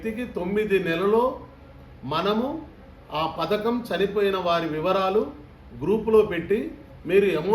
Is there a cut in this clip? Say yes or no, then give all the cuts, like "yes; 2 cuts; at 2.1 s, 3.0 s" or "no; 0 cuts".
no; 0 cuts